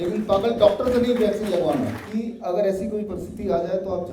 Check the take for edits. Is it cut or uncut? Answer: cut